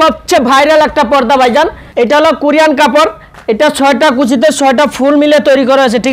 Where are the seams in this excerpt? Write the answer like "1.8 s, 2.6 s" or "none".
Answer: 1.8 s